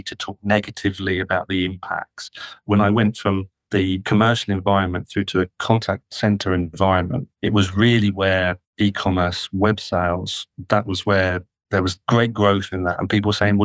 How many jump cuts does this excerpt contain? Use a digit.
5